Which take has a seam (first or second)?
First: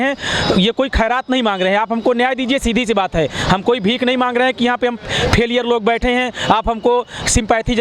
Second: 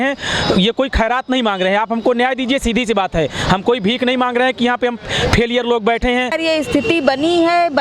second